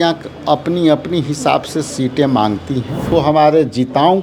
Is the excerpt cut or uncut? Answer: cut